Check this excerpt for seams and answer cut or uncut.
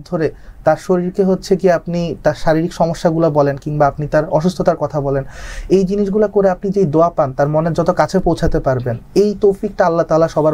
uncut